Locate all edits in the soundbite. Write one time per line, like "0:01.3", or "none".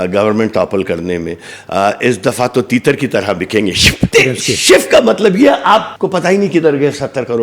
0:04.1
0:05.9